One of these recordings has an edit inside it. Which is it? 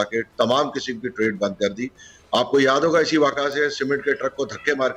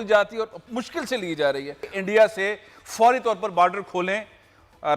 second; 1 cut; at 1.8 s

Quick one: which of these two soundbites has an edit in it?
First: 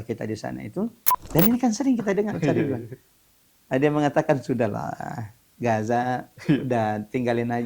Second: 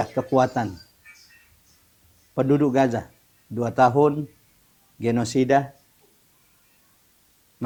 first; 1 cut; at 1.1 s

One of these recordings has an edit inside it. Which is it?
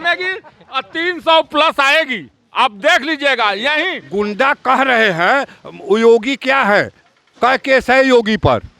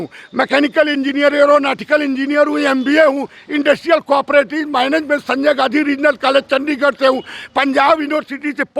first; 1 cut; at 4.0 s

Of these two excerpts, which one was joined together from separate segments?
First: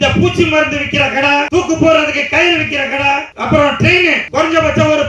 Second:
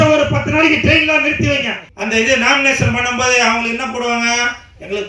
second; 1 cut; at 1.9 s

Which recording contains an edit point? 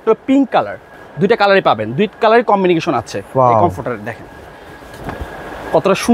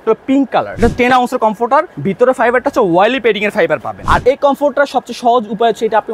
second; 3 cuts; at 0.8 s, 2.0 s, 4.0 s

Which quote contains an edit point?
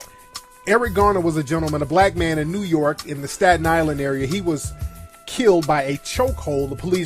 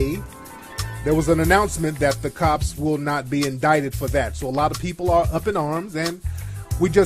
first; 1 cut; at 1.4 s

